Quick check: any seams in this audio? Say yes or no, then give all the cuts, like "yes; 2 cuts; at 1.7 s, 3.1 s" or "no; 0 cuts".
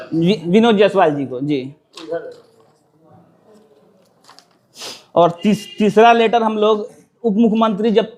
no; 0 cuts